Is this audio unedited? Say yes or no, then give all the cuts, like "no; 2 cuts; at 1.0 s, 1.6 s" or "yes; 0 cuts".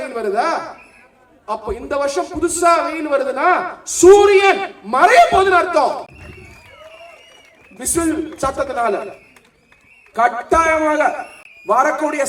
yes; 0 cuts